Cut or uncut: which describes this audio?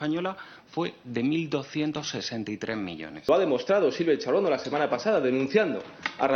cut